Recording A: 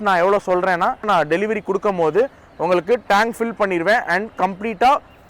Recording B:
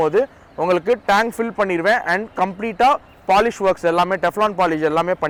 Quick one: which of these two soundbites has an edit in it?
A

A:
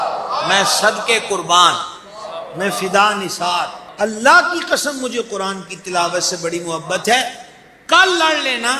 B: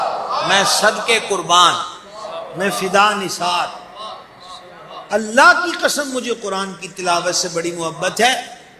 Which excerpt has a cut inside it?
A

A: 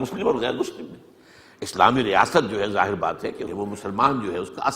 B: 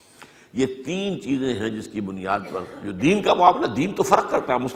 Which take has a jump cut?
A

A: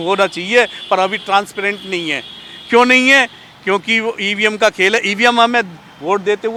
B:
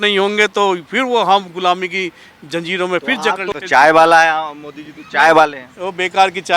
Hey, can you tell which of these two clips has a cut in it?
B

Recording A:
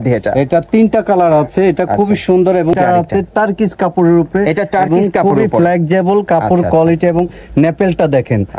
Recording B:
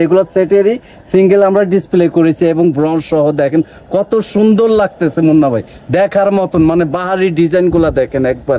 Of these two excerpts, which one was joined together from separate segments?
A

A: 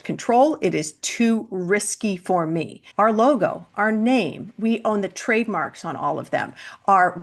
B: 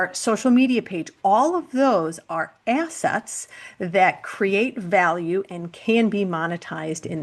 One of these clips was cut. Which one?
A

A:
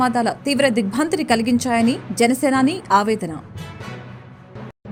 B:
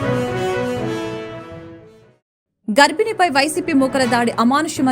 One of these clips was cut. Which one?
B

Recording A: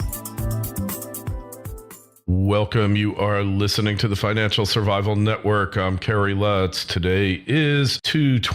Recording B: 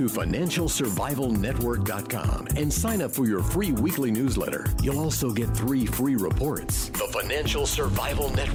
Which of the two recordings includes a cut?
A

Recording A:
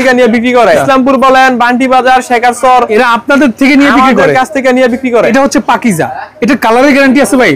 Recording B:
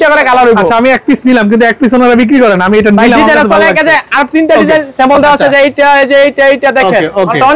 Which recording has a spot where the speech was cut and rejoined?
A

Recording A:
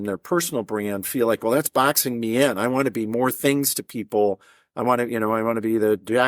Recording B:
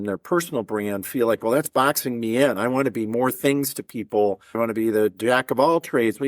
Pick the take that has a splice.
B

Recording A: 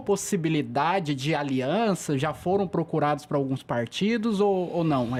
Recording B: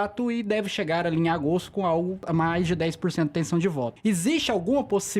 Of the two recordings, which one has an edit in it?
B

